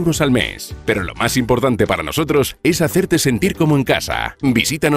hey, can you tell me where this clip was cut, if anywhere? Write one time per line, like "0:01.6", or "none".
none